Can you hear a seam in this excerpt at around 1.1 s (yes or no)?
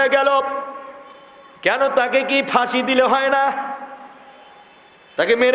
no